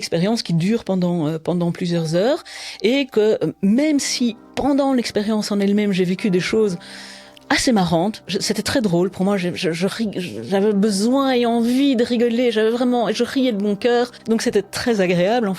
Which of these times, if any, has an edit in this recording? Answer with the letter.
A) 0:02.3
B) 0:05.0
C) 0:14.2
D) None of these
C